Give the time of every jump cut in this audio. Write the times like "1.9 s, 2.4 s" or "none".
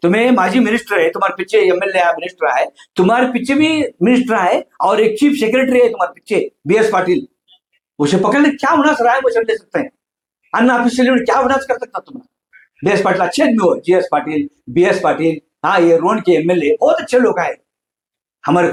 none